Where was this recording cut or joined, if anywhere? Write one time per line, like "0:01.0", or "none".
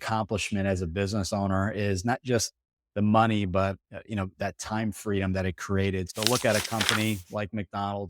0:06.1